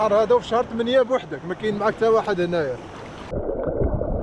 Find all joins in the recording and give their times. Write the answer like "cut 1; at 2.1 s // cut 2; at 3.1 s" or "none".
cut 1; at 3.3 s